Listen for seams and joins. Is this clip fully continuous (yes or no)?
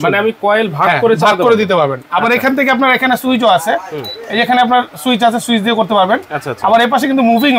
yes